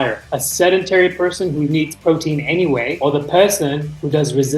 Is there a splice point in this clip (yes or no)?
no